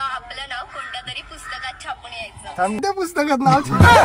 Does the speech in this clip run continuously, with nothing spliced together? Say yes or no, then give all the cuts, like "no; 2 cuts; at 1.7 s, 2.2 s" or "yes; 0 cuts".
no; 1 cut; at 2.8 s